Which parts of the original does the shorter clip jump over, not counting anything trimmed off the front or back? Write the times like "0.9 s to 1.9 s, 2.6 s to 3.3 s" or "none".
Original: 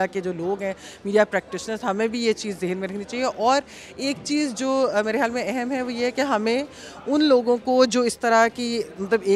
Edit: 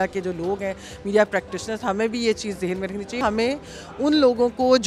3.2 s to 6.3 s